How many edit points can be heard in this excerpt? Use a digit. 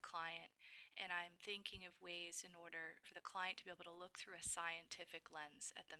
1